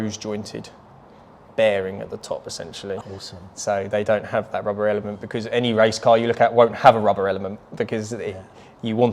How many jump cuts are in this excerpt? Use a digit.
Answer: 0